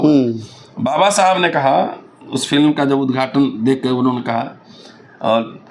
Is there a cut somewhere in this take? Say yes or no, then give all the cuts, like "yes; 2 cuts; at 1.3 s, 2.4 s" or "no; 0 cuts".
no; 0 cuts